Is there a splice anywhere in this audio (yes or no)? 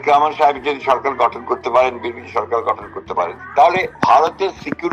yes